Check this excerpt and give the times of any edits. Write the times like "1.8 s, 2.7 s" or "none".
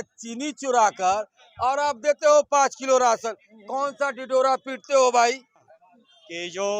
5.7 s

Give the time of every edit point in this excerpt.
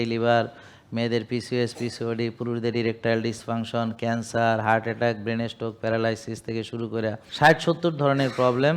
7.2 s

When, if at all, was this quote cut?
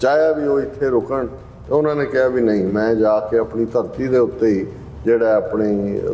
none

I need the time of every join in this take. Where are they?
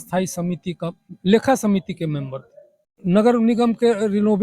none

